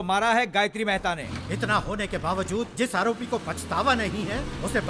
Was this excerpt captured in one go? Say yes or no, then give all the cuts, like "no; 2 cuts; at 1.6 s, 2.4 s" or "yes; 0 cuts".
no; 1 cut; at 1.2 s